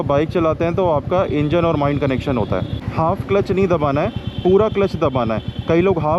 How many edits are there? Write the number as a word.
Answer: one